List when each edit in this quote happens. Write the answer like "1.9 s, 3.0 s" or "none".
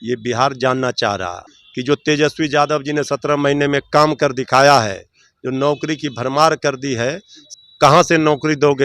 1.4 s, 7.4 s